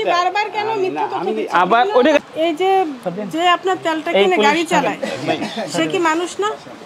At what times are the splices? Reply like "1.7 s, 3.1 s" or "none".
2.2 s